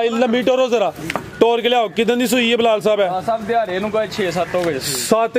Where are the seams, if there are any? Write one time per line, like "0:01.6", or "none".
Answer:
none